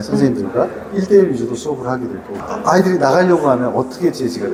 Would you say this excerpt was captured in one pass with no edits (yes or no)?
yes